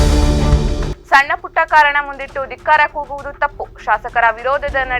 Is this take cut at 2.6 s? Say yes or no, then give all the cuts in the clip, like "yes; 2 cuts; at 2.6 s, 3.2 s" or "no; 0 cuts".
no; 1 cut; at 0.9 s